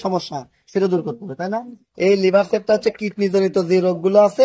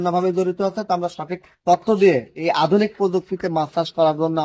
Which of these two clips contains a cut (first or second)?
first